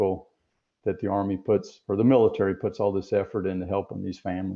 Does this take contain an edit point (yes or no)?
no